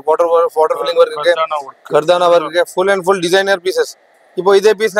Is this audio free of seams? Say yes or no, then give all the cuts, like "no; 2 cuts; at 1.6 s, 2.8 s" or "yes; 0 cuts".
yes; 0 cuts